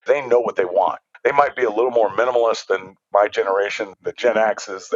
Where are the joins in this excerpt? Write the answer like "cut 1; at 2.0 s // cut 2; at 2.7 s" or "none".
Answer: cut 1; at 1.1 s // cut 2; at 2.9 s // cut 3; at 3.9 s